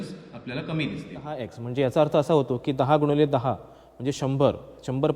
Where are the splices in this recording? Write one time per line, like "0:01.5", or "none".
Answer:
0:01.6